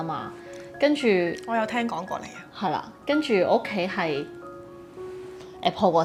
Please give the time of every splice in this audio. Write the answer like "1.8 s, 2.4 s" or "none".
none